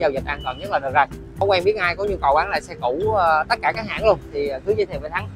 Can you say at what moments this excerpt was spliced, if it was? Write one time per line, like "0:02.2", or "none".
0:01.4